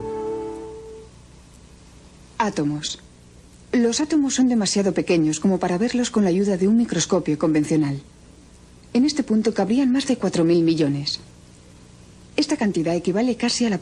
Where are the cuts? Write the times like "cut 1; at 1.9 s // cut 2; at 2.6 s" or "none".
cut 1; at 3.6 s